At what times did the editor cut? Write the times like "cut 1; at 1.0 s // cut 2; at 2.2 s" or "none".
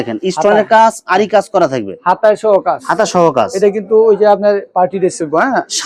none